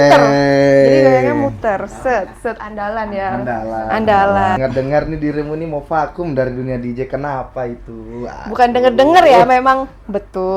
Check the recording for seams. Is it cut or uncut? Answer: cut